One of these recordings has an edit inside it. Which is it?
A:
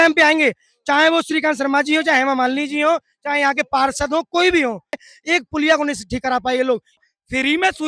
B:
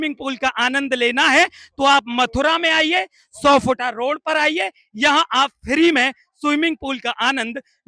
A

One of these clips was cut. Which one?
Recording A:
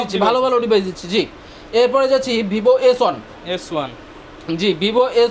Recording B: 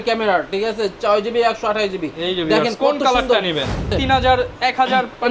B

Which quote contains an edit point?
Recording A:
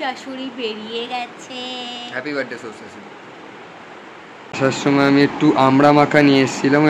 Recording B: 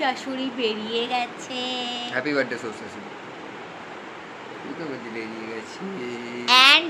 A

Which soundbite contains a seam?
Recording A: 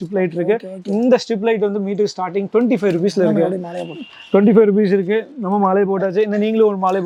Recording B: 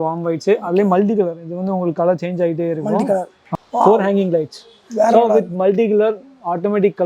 B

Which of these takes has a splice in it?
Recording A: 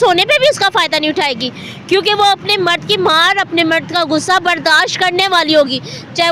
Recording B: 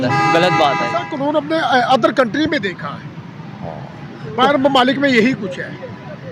B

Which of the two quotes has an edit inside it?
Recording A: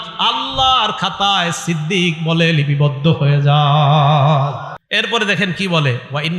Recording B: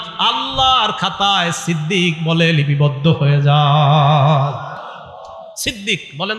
A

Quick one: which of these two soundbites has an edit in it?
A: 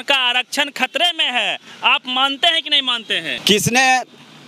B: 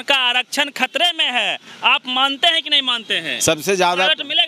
A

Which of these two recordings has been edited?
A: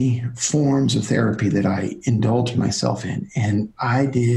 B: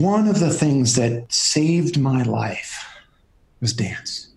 B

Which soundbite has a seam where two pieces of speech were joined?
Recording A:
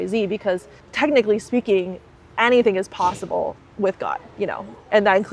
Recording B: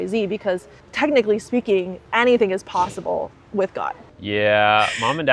B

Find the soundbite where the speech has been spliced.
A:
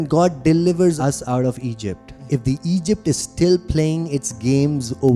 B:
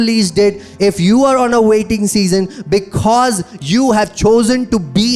A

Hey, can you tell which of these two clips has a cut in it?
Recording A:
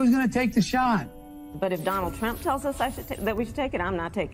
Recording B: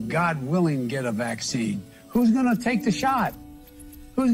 A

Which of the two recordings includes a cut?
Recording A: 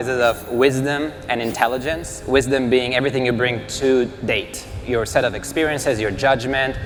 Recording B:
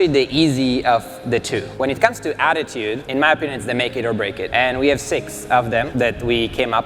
B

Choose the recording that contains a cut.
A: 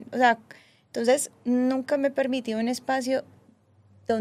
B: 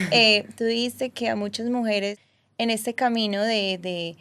B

